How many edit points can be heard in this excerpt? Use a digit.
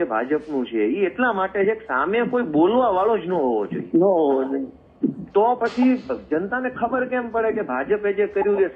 0